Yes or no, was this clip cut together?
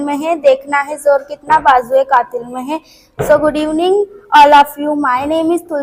no